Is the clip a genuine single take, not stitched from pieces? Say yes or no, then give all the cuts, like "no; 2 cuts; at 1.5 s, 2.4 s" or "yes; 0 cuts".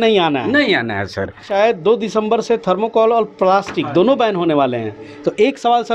no; 1 cut; at 1.4 s